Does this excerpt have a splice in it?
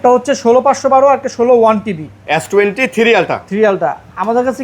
yes; 1 cut; at 2.1 s

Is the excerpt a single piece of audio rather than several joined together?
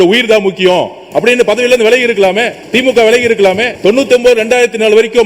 no; 2 cuts; at 2.6 s, 3.7 s

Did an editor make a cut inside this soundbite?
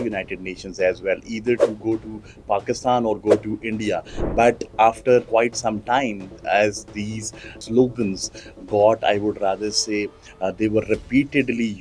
yes; 2 cuts; at 5.3 s, 7.6 s

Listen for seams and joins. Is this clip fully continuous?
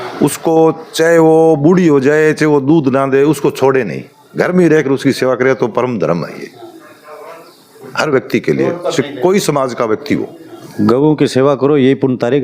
no; 1 cut; at 10.5 s

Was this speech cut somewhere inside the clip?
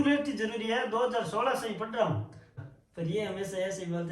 yes; 1 cut; at 2.6 s

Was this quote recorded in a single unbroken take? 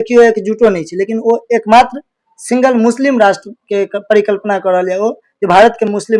yes; 0 cuts

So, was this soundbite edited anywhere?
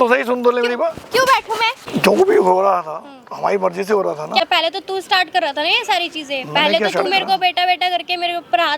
yes; 2 cuts; at 2.1 s, 4.4 s

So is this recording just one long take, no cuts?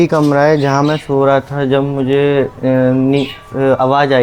yes; 0 cuts

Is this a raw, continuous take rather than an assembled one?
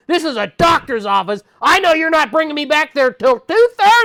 yes; 0 cuts

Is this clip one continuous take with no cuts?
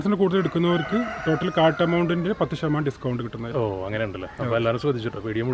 yes; 0 cuts

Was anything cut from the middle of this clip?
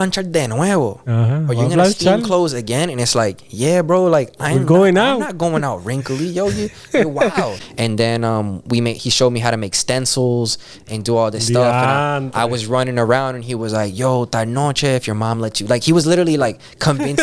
yes; 1 cut; at 7.6 s

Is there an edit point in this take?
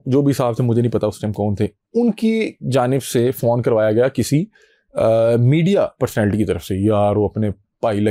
no; 0 cuts

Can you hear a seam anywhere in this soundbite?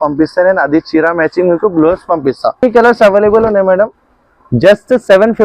yes; 1 cut; at 2.6 s

